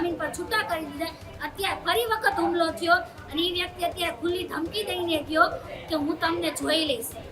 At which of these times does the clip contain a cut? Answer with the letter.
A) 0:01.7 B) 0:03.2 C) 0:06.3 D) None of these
D